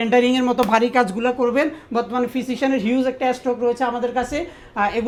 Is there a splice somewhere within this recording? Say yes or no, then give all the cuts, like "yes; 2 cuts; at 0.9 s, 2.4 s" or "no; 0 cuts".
no; 0 cuts